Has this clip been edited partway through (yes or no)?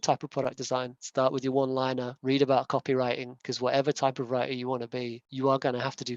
no